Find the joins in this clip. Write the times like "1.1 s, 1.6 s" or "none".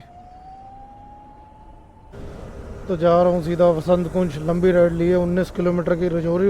2.1 s